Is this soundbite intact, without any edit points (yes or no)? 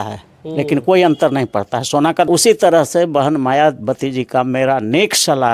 no